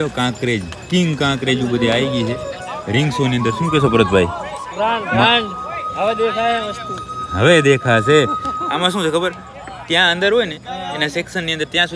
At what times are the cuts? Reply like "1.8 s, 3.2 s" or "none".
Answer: none